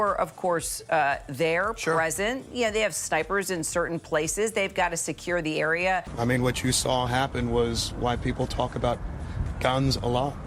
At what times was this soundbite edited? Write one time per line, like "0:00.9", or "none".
none